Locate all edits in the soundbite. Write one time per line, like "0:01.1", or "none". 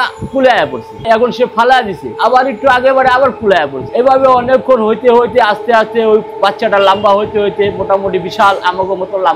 none